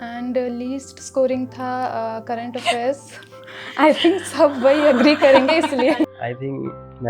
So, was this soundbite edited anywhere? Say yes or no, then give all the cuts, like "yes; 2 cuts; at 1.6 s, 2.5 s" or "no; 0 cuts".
yes; 1 cut; at 6.0 s